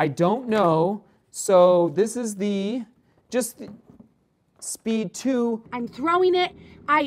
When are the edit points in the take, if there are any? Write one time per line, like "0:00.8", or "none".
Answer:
0:05.7